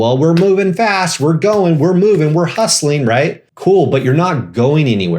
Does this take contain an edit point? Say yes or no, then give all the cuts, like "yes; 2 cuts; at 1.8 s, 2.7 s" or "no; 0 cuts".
yes; 1 cut; at 3.4 s